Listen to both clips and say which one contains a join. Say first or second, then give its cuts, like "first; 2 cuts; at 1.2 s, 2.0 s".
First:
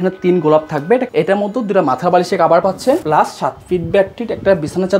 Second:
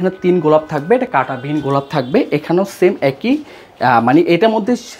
first; 2 cuts; at 1.1 s, 3.0 s